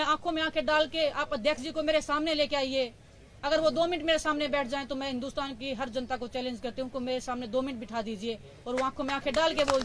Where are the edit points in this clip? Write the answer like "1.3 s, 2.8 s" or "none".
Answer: none

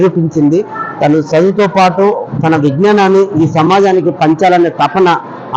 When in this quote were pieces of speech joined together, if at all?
none

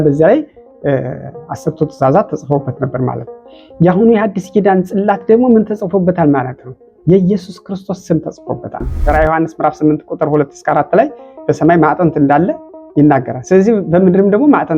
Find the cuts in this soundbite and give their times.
8.9 s

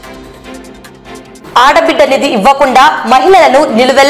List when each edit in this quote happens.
none

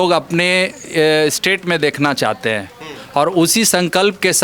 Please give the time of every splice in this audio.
none

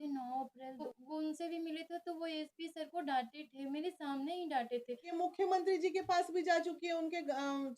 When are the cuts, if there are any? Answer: 0.9 s, 5.1 s

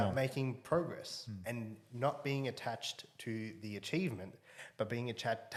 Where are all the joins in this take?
none

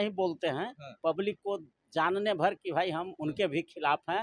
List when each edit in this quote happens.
none

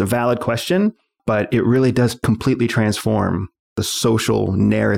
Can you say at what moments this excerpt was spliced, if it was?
1.1 s, 2.2 s

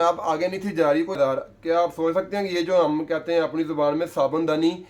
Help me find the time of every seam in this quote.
1.2 s

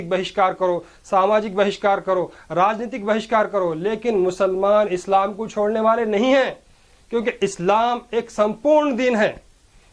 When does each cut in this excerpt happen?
none

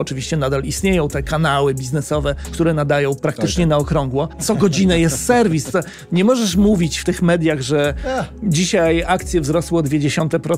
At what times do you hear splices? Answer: 2.4 s, 4.4 s

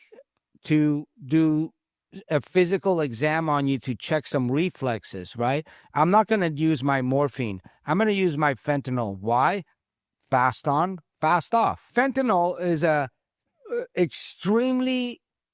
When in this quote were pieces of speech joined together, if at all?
11.8 s

